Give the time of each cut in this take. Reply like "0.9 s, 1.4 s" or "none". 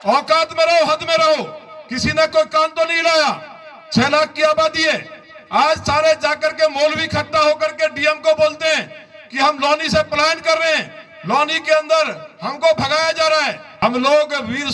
13.6 s